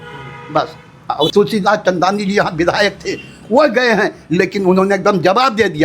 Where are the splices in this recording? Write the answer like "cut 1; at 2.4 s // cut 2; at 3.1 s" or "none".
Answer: cut 1; at 1.3 s

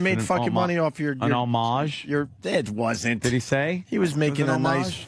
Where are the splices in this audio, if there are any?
cut 1; at 1.9 s

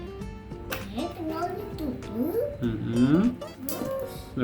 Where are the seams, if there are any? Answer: cut 1; at 0.9 s

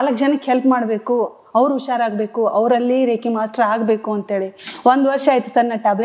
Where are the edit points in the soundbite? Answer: none

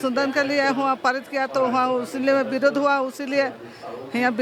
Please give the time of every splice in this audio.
none

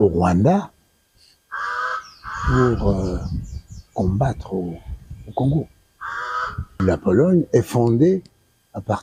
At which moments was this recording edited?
cut 1; at 6.7 s

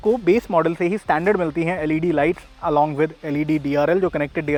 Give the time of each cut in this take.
none

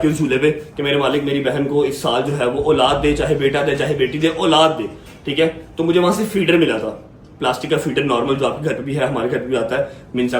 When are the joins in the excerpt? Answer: none

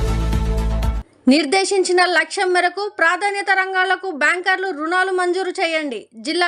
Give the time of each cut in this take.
cut 1; at 1.0 s

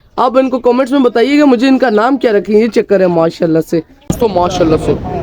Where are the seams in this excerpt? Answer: cut 1; at 4.1 s

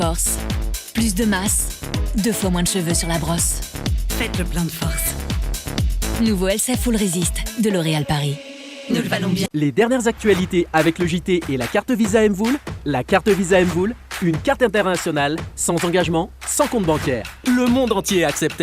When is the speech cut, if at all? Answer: cut 1; at 9.5 s

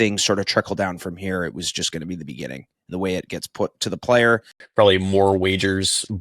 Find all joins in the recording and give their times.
cut 1; at 4.6 s

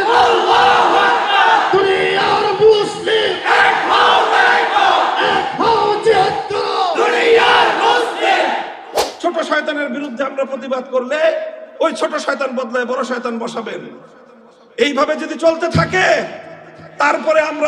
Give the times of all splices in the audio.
cut 1; at 9.0 s

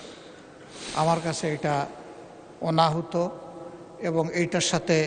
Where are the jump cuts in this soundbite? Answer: none

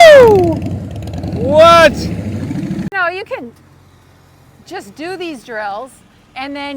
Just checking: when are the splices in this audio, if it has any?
cut 1; at 2.9 s

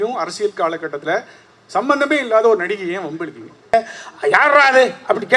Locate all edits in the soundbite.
cut 1; at 3.7 s

